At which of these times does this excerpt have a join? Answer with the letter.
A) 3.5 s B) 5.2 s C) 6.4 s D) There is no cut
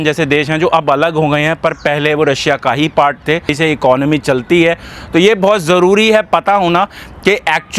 A